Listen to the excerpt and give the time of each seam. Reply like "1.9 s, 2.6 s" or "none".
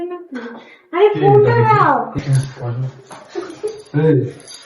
2.2 s